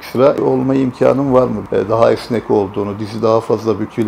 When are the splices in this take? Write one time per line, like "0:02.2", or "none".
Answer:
0:01.7